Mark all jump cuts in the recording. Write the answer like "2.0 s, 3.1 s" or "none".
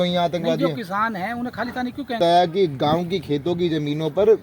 2.2 s